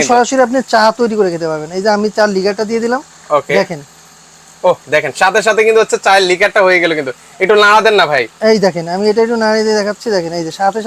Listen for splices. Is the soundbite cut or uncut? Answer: uncut